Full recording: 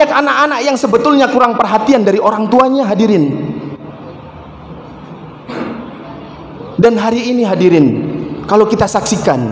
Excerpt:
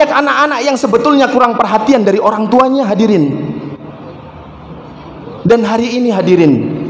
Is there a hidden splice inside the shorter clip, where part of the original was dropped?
yes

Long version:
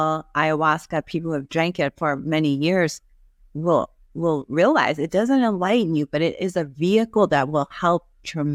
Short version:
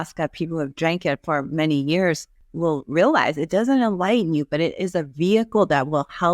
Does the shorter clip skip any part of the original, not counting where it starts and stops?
yes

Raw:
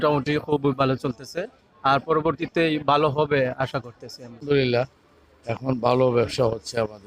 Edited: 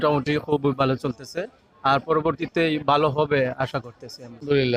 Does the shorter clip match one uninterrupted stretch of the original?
yes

